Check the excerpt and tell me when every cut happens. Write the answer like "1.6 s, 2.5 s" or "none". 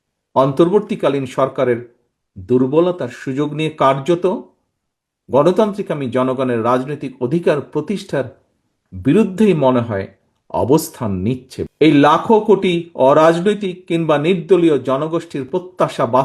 11.5 s